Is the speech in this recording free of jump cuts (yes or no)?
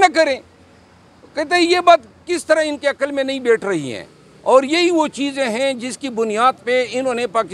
yes